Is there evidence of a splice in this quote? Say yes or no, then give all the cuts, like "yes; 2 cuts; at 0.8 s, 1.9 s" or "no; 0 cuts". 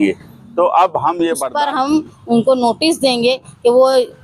yes; 1 cut; at 1.5 s